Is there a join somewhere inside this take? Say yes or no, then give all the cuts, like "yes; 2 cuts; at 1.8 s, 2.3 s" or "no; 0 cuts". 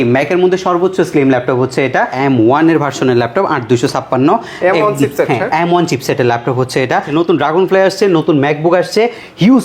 yes; 2 cuts; at 2.1 s, 7.1 s